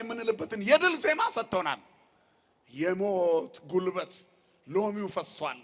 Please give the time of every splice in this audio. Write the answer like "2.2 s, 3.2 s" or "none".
none